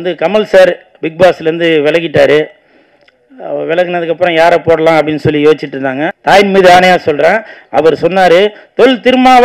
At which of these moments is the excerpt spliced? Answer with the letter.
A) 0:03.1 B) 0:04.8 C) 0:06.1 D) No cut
C